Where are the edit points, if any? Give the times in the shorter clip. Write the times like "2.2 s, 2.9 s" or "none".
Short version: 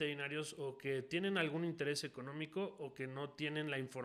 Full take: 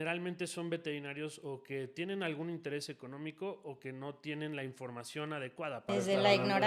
none